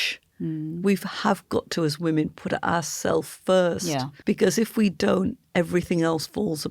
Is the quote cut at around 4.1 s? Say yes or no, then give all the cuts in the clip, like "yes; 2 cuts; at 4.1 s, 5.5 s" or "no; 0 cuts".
yes; 1 cut; at 4.1 s